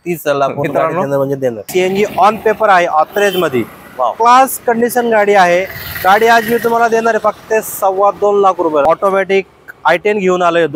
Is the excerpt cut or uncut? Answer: cut